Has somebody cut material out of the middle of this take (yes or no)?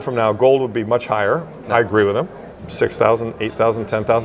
no